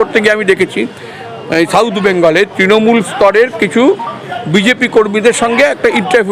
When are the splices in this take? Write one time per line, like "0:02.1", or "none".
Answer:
none